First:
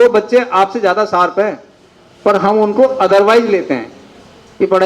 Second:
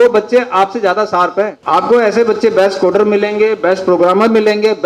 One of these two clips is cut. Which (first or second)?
second